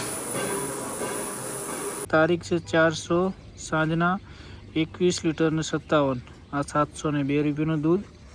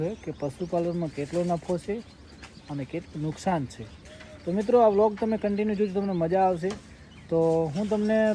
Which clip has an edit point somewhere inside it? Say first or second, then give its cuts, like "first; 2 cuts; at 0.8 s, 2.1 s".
first; 1 cut; at 2.1 s